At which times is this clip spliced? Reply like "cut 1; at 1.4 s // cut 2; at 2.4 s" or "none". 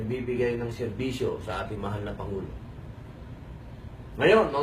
cut 1; at 2.1 s

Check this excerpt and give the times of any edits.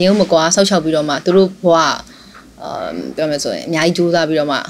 none

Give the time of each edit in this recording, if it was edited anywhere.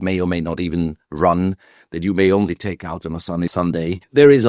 cut 1; at 3.5 s

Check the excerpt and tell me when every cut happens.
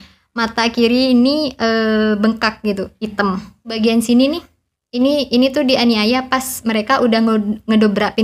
cut 1; at 3.8 s

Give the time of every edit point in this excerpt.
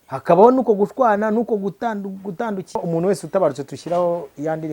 cut 1; at 2.8 s

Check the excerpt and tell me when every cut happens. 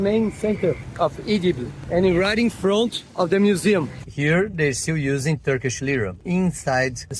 cut 1; at 4.0 s

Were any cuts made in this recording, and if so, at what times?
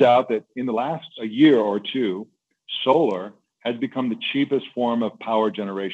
cut 1; at 1.2 s

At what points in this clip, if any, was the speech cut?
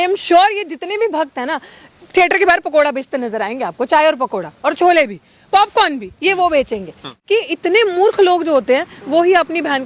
cut 1; at 7.1 s

